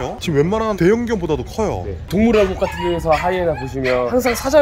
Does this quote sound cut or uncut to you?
uncut